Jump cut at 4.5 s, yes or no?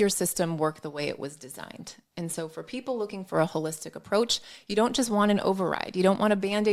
no